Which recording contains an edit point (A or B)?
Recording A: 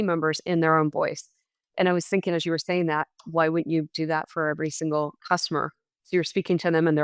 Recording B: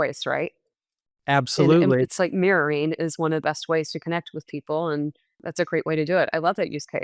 B